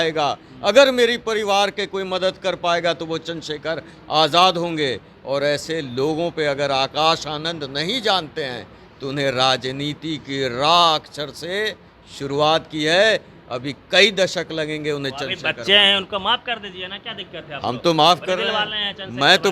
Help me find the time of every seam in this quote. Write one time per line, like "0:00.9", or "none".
none